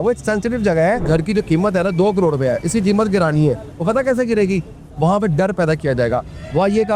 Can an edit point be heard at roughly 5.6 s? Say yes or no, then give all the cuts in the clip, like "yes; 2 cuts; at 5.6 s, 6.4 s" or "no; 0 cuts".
no; 1 cut; at 1.0 s